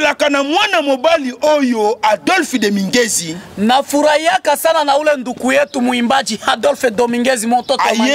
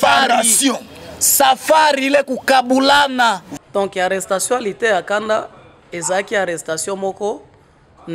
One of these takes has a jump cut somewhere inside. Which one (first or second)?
second